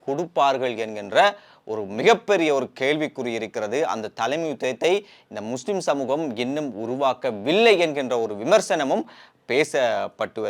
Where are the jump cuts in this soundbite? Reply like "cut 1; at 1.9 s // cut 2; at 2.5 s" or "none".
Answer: none